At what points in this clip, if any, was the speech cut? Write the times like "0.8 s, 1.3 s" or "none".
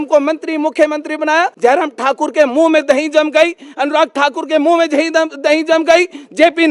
1.5 s